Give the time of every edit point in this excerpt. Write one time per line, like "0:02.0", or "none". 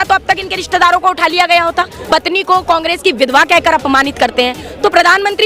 0:02.0